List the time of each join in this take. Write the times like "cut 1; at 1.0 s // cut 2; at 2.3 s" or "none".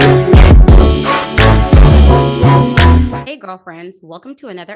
cut 1; at 3.3 s